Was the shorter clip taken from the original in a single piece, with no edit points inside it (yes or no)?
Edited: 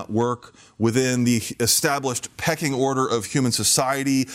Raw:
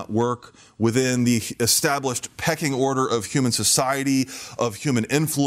yes